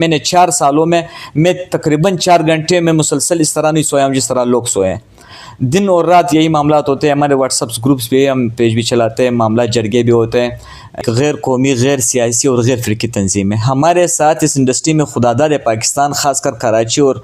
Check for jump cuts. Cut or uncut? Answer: cut